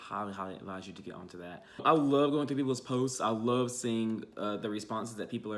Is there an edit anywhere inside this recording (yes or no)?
yes